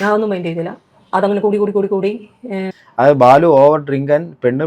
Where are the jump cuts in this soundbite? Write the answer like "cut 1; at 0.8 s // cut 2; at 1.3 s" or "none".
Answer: cut 1; at 2.8 s